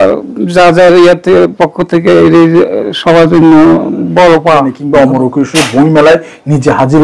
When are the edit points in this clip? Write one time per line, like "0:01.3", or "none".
0:04.8